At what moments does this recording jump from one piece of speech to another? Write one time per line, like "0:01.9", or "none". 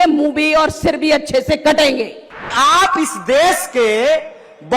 0:02.5